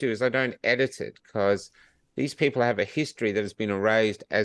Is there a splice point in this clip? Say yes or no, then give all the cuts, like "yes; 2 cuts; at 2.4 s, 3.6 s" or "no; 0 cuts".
no; 0 cuts